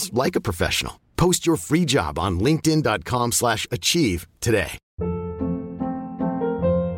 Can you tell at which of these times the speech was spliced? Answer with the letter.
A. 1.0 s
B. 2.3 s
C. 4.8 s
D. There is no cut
C